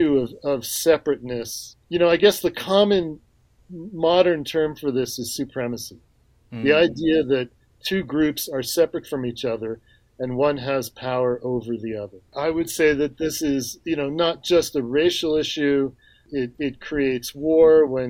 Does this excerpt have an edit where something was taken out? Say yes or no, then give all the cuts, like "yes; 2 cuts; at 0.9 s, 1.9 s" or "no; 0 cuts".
yes; 3 cuts; at 1.7 s, 12.2 s, 16.2 s